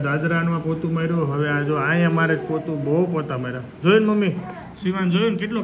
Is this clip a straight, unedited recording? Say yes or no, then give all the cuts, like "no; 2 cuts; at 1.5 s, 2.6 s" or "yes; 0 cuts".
yes; 0 cuts